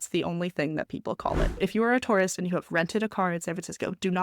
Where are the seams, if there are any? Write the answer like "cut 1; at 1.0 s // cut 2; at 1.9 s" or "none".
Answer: cut 1; at 1.6 s